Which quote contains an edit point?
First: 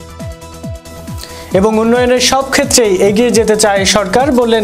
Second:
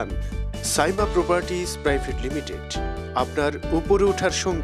first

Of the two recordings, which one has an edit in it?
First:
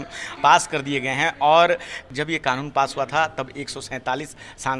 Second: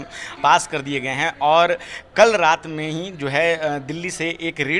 first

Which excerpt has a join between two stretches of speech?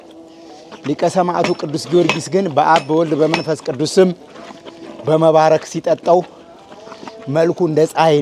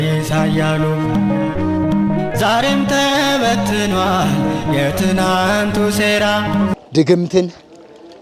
second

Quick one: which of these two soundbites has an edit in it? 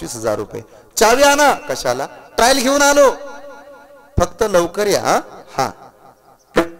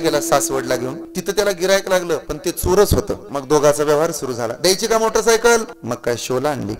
second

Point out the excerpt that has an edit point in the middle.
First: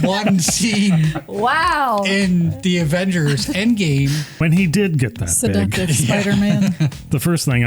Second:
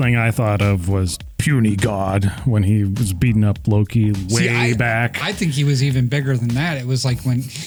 first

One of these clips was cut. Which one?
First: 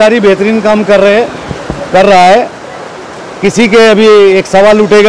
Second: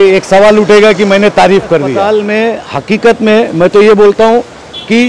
second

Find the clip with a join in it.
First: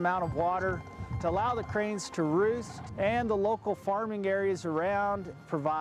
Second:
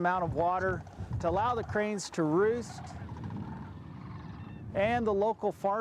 first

